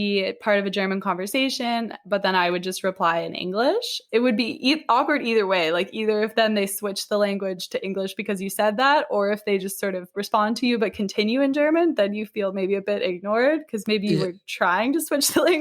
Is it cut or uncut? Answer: cut